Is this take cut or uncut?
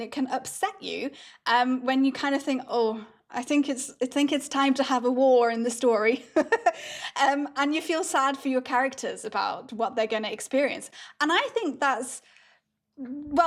uncut